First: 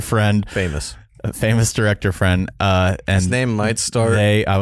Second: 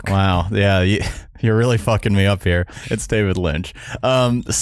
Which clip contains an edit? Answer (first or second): second